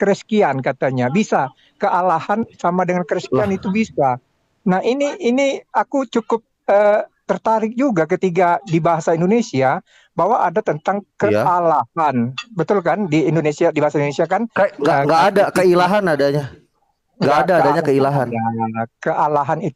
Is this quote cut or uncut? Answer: uncut